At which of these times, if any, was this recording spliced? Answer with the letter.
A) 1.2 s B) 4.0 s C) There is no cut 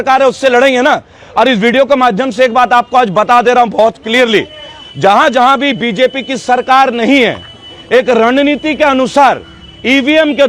C